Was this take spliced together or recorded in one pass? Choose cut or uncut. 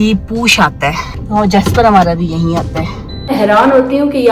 cut